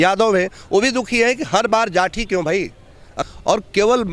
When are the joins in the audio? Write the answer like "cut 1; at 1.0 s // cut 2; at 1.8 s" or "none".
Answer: cut 1; at 3.0 s

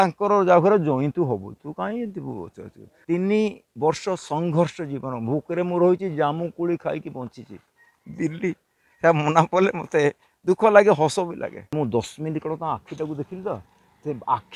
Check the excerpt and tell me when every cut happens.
cut 1; at 3.0 s // cut 2; at 11.7 s

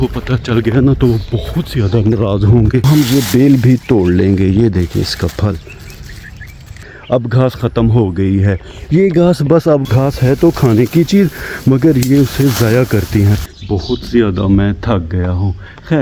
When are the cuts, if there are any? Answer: cut 1; at 2.9 s // cut 2; at 6.9 s // cut 3; at 9.8 s // cut 4; at 13.4 s

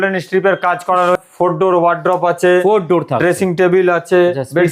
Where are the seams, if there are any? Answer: cut 1; at 1.1 s

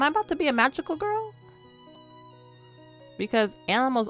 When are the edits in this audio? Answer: none

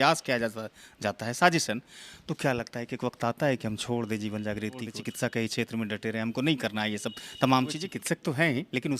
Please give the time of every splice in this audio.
cut 1; at 4.9 s // cut 2; at 7.8 s

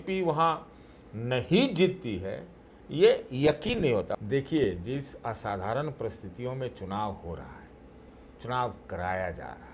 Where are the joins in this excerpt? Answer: cut 1; at 4.1 s

